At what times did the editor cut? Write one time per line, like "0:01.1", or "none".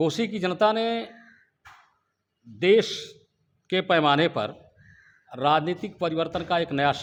none